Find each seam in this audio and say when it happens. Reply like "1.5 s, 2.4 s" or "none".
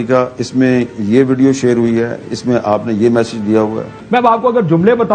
3.9 s